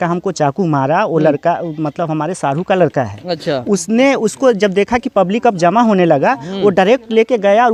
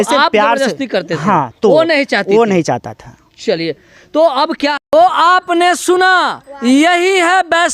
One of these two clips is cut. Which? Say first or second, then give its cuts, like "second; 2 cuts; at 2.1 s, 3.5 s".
second; 1 cut; at 4.8 s